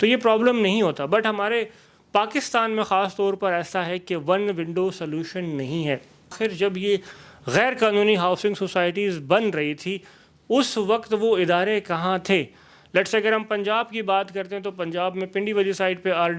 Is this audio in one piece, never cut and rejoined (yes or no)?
no